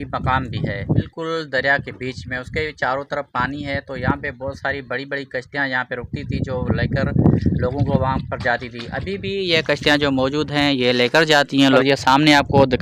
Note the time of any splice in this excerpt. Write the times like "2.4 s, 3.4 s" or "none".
1.1 s, 11.8 s